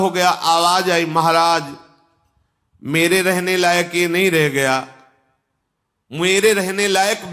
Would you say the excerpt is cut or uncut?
uncut